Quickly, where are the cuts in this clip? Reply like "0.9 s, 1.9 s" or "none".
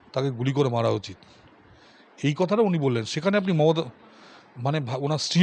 none